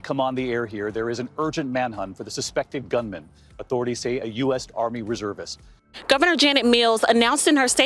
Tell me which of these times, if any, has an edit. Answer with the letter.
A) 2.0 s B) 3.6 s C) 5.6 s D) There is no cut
C